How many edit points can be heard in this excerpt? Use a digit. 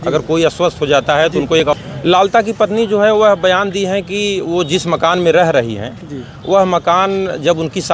1